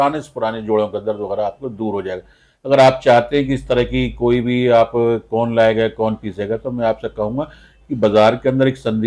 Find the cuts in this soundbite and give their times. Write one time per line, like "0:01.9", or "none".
none